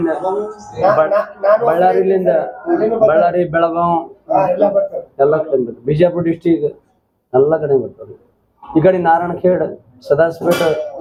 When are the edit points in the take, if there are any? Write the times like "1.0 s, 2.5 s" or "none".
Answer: none